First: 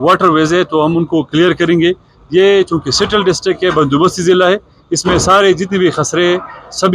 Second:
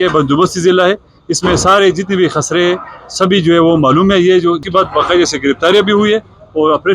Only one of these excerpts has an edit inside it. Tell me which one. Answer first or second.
second